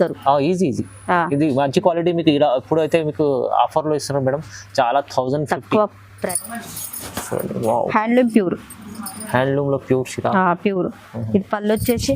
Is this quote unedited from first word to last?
no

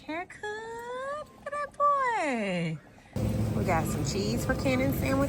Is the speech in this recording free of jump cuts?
yes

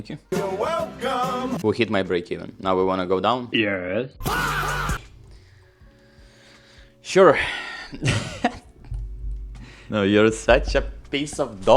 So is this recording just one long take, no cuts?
no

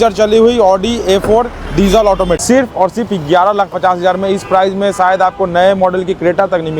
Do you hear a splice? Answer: yes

